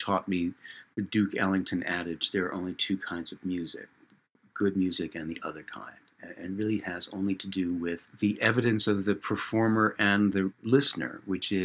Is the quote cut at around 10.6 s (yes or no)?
yes